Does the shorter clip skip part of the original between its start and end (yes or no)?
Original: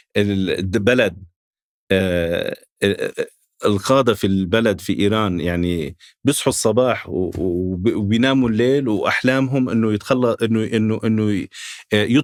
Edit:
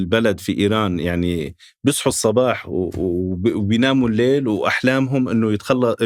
no